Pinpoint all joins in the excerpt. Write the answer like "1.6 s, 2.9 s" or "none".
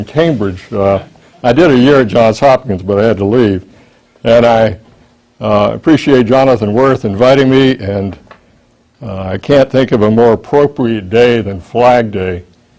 9.1 s